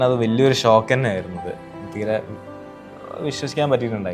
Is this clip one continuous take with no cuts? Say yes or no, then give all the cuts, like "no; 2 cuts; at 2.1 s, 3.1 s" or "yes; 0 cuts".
yes; 0 cuts